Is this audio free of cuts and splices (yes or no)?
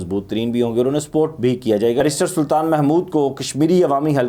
no